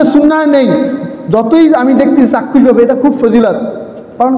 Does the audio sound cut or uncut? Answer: uncut